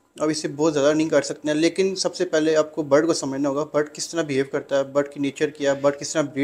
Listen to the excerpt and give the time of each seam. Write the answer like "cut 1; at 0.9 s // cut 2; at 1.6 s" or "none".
none